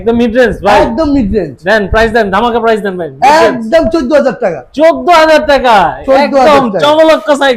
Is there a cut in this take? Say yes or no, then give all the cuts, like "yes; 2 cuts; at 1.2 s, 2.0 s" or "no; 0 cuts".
no; 0 cuts